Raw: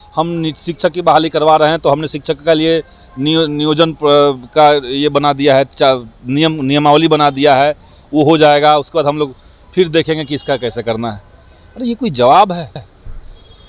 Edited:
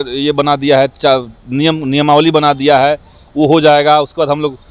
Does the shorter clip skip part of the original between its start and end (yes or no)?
no